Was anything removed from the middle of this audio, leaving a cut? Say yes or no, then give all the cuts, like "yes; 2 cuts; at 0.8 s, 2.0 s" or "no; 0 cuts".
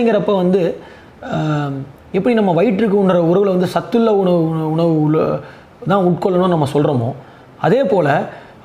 no; 0 cuts